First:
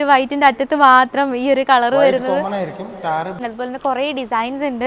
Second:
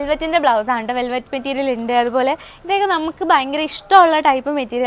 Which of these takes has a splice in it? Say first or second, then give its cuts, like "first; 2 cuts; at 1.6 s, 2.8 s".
first; 1 cut; at 3.4 s